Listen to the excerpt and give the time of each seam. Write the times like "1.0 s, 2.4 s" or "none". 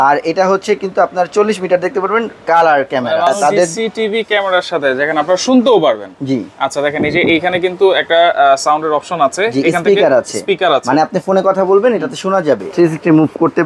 3.4 s, 12.7 s